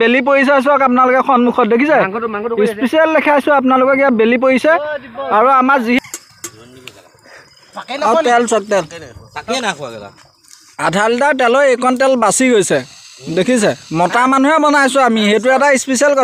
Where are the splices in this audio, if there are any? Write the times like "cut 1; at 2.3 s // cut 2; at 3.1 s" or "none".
cut 1; at 6.0 s